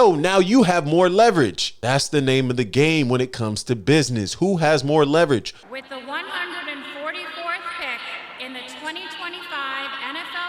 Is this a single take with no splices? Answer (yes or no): no